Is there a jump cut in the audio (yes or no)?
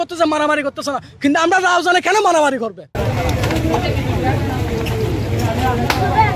no